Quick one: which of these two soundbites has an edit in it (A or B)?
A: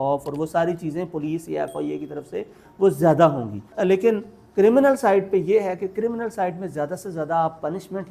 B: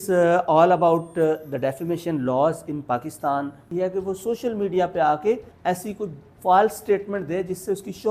B